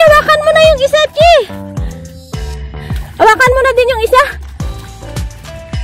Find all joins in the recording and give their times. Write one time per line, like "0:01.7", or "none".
0:01.5
0:03.1
0:04.3

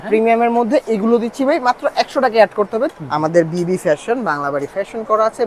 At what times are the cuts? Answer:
0:02.9

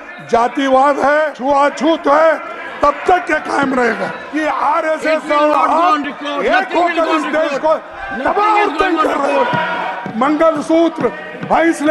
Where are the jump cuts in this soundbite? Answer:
0:01.3
0:04.2
0:09.9

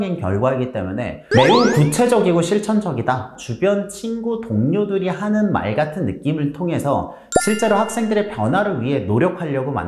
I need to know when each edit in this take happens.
0:03.3

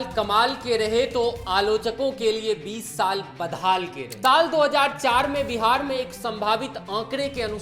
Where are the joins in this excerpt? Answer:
0:04.0

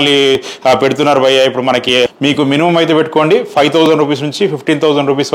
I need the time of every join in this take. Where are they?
0:02.1

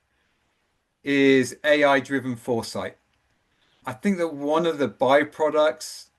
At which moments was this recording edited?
0:03.8

